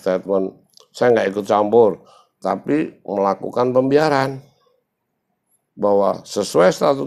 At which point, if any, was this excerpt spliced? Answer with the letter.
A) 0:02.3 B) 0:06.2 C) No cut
C